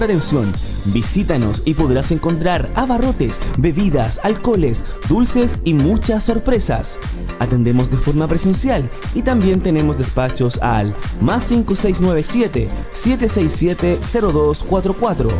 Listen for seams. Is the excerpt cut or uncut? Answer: uncut